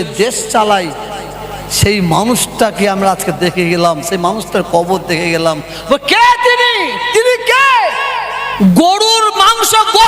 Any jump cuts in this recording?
yes; 1 cut; at 8.4 s

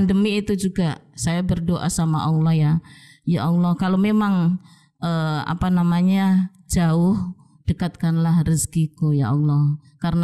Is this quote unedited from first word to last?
yes; 0 cuts

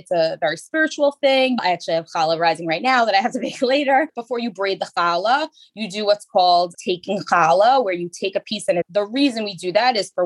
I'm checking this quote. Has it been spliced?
no; 0 cuts

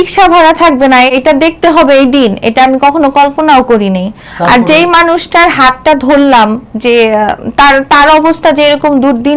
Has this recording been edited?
no; 0 cuts

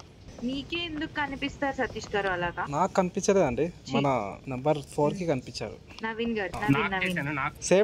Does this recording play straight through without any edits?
yes; 0 cuts

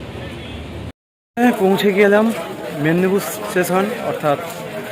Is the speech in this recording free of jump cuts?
no; 1 cut; at 1.0 s

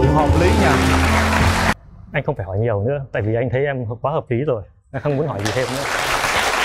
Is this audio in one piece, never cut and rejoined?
no; 1 cut; at 1.8 s

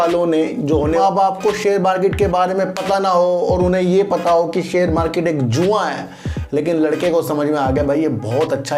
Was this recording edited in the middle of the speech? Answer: yes; 1 cut; at 0.9 s

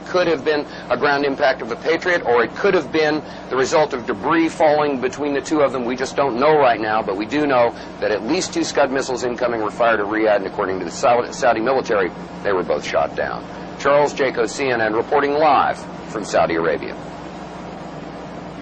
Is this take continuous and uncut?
no; 1 cut; at 2.9 s

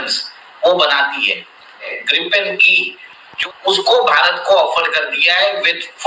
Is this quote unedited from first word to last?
no; 2 cuts; at 1.9 s, 3.3 s

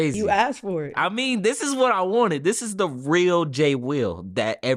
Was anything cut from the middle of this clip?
no; 0 cuts

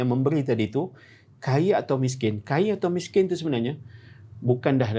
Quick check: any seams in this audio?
no; 0 cuts

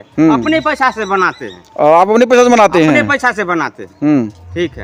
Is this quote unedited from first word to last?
yes; 0 cuts

